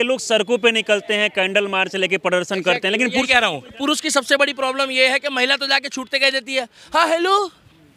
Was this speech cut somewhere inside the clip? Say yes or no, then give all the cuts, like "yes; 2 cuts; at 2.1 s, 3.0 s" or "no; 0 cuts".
yes; 1 cut; at 3.8 s